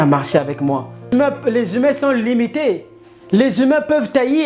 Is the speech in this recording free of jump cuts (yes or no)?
no